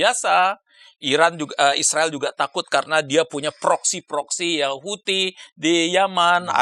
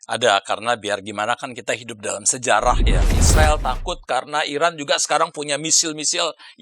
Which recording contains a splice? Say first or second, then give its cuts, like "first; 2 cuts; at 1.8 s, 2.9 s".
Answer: second; 1 cut; at 3.2 s